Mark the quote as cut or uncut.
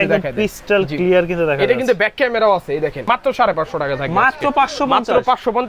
cut